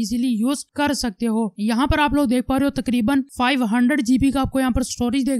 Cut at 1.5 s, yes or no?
yes